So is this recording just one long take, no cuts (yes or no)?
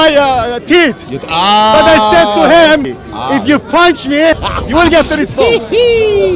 no